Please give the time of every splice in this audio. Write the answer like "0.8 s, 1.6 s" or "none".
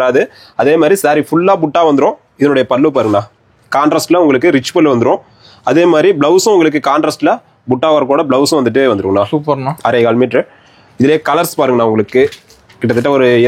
none